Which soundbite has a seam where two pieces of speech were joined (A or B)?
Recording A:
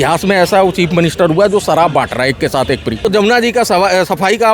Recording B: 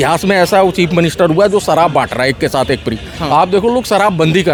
A